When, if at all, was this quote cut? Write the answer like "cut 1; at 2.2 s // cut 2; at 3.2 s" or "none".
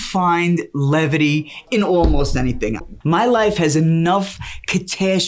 cut 1; at 1.6 s // cut 2; at 2.8 s